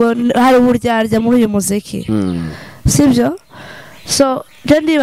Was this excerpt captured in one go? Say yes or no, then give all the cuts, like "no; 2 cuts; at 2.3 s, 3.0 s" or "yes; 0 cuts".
yes; 0 cuts